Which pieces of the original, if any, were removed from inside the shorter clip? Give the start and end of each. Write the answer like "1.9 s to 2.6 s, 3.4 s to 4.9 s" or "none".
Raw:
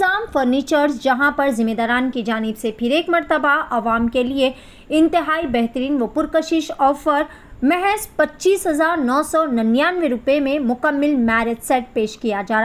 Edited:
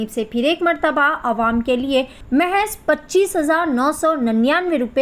4.6 s to 7.5 s